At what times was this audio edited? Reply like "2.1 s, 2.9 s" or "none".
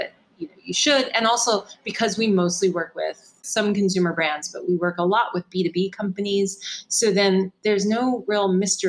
none